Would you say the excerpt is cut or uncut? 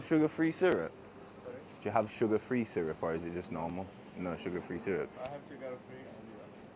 uncut